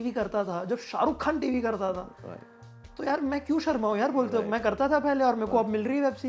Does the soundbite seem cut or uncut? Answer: uncut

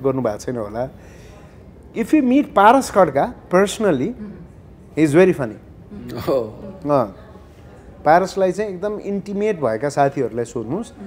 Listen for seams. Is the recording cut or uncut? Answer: uncut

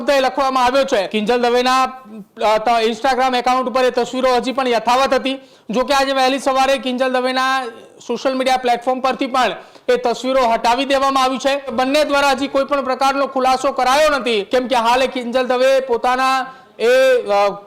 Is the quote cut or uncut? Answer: cut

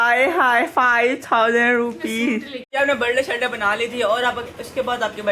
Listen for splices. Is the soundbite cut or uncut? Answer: cut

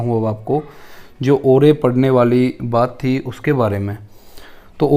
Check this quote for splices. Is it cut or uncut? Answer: uncut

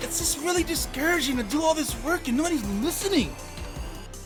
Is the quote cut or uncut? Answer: uncut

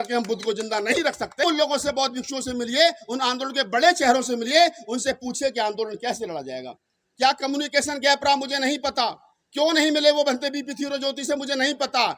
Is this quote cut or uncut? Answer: cut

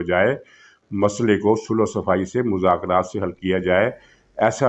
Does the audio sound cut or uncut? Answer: uncut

